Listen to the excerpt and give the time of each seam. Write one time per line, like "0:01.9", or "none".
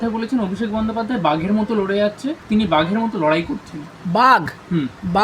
0:02.4